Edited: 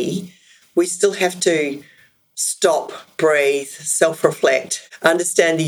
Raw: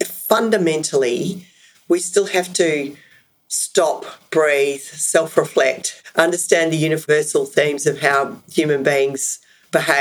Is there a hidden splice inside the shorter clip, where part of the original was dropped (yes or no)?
no